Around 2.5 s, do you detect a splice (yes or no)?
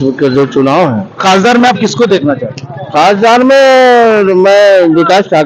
no